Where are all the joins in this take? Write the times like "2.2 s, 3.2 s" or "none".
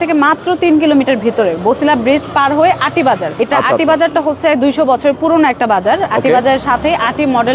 3.3 s